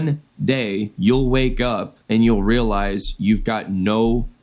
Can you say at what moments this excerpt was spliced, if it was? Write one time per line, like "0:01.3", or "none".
0:00.9
0:01.9